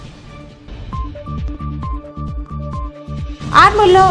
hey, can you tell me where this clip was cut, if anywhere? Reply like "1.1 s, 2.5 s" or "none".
none